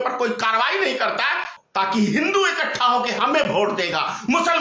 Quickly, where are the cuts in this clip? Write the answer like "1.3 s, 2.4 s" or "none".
1.6 s